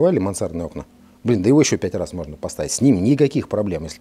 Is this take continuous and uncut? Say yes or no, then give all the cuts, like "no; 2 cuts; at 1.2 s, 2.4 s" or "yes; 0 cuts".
yes; 0 cuts